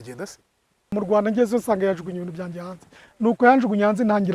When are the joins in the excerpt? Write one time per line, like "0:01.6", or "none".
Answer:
0:01.0

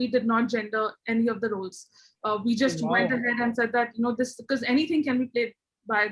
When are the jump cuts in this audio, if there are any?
none

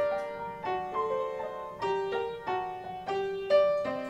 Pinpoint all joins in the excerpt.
none

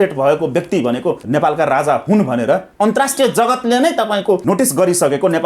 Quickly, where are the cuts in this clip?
0:01.2
0:02.7
0:04.4

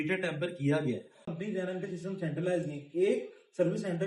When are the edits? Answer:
0:01.3

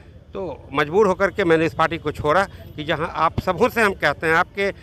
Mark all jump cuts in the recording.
none

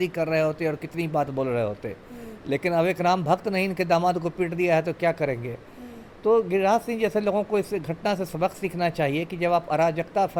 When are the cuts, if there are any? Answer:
none

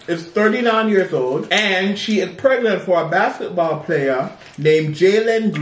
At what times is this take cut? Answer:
0:01.5

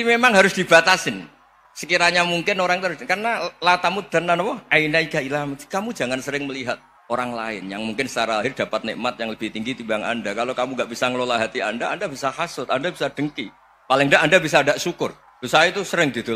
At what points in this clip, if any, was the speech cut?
0:06.9
0:15.3

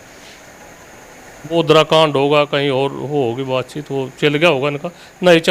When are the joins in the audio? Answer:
0:01.6

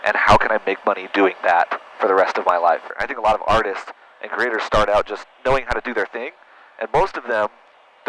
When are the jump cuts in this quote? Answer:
0:03.1

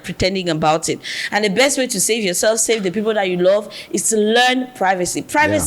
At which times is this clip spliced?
none

